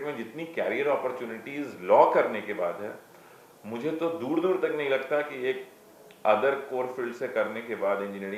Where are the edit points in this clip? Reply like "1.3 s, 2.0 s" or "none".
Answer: none